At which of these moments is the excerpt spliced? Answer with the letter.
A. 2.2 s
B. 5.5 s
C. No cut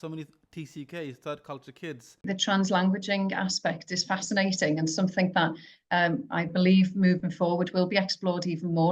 A